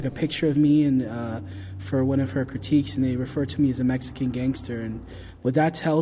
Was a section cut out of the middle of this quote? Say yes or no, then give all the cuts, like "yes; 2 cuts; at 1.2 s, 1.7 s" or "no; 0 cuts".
no; 0 cuts